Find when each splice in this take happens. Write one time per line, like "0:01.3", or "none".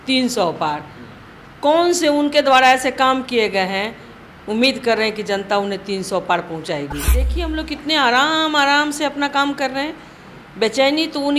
0:07.3